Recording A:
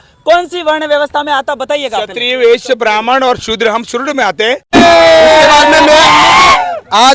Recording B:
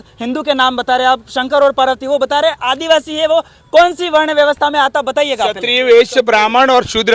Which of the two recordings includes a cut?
A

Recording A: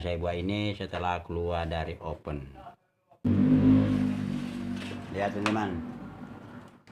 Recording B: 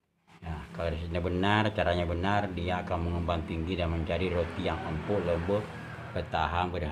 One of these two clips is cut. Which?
A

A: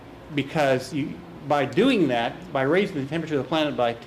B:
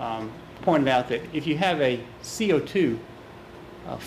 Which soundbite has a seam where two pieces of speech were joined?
A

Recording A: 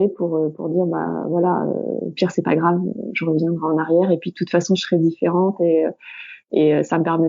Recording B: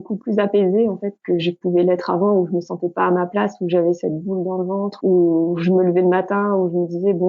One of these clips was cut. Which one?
B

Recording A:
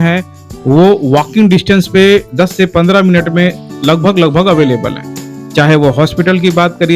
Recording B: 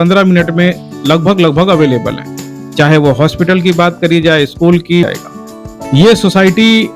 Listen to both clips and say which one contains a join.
B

